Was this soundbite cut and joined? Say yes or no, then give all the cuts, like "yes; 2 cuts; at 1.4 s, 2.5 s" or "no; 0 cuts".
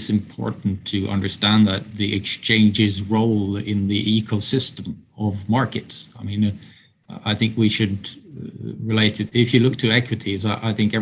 no; 0 cuts